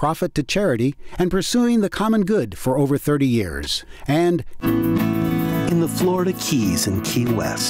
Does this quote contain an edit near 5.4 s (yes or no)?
yes